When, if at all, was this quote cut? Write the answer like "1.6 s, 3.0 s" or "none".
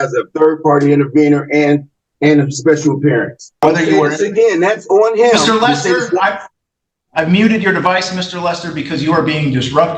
3.6 s

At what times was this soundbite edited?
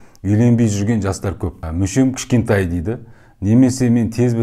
1.7 s

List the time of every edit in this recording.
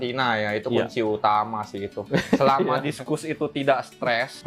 none

